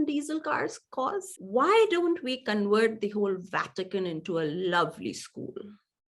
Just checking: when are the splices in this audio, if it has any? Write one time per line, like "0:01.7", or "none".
0:01.3